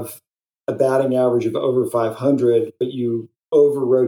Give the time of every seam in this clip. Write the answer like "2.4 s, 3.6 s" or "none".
none

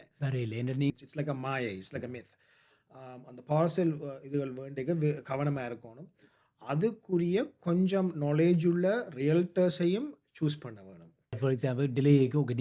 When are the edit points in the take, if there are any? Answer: 0.9 s, 11.4 s

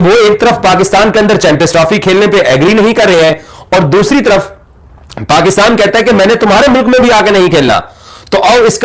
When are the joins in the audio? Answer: none

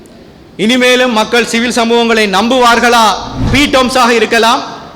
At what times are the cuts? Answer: 3.5 s

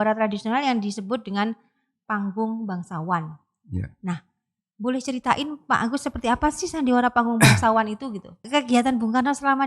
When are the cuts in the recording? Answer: 8.4 s

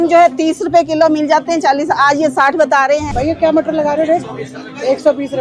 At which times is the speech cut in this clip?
3.0 s

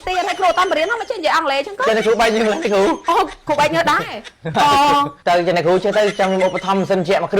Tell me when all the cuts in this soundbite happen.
5.1 s

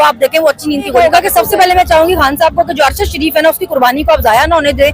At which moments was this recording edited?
1.0 s

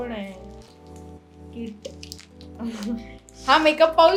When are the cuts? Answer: none

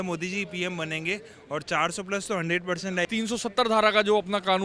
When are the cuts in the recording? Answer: 3.1 s

